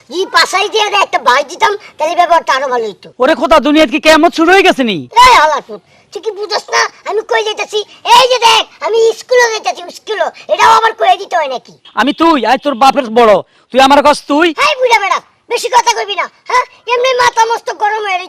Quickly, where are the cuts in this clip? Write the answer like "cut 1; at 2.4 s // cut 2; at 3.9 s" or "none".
cut 1; at 3.0 s // cut 2; at 5.0 s // cut 3; at 11.8 s